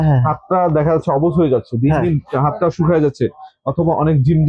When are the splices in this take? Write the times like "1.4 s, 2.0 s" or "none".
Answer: none